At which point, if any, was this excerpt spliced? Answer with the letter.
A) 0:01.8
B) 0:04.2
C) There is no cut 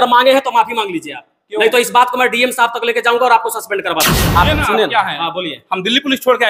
B